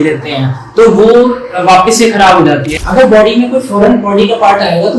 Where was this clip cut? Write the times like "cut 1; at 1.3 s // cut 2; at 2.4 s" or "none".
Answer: cut 1; at 2.7 s

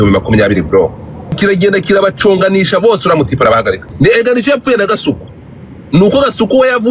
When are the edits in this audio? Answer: cut 1; at 1.4 s // cut 2; at 3.9 s

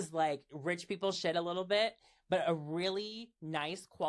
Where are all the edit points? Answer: none

